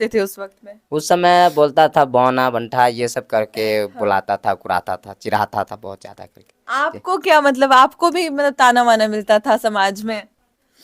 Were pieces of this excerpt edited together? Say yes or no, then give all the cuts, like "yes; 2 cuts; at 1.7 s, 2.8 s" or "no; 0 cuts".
no; 0 cuts